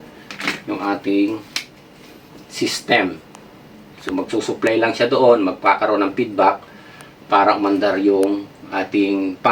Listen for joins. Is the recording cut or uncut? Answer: uncut